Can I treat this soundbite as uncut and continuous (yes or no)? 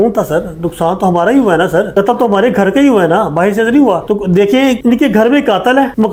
yes